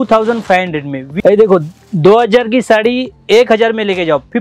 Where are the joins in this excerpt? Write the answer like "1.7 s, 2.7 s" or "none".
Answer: 1.1 s